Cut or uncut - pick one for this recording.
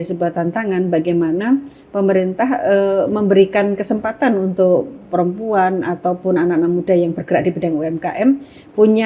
uncut